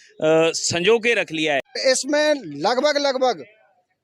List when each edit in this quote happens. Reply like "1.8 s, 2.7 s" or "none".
1.7 s